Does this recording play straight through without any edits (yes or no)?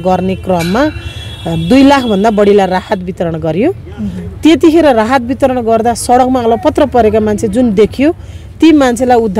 yes